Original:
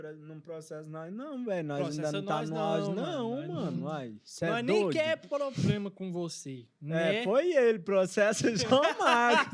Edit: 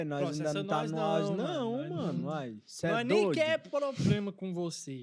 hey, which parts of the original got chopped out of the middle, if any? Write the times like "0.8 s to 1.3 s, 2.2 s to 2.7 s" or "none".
none